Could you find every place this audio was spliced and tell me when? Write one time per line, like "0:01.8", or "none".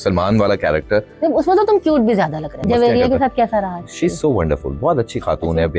0:02.6